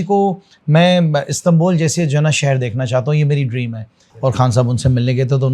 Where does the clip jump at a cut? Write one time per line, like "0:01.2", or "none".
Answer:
0:04.0